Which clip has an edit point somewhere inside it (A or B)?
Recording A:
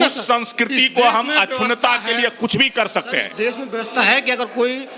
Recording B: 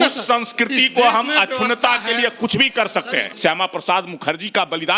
B